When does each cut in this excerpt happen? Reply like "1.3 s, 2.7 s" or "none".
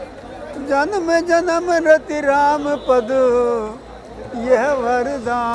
none